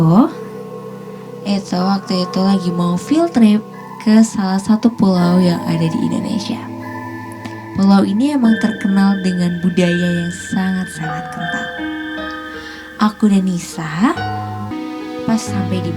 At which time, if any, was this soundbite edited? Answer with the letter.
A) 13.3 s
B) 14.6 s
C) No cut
B